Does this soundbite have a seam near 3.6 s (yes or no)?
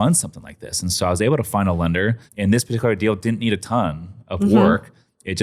no